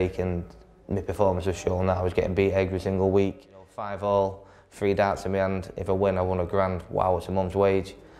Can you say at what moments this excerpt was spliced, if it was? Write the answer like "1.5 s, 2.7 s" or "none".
3.9 s